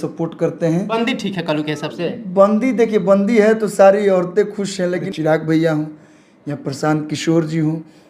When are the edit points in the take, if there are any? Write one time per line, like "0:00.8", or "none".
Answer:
0:00.9
0:05.1